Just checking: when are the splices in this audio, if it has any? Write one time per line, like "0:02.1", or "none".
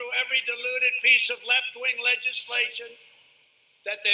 0:03.2